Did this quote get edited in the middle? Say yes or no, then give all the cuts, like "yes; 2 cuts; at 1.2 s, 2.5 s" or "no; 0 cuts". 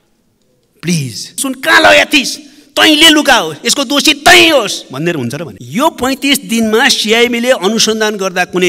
yes; 2 cuts; at 1.4 s, 5.5 s